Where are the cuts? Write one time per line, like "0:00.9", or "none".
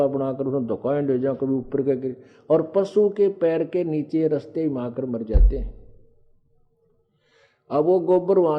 none